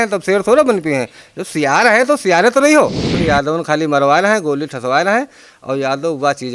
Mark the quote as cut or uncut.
cut